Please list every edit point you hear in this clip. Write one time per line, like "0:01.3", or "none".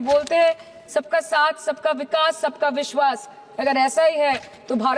none